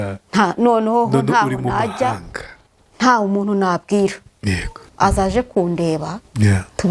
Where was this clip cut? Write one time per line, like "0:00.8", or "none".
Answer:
0:04.8